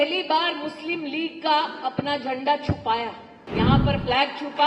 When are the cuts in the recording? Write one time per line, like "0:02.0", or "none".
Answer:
0:03.4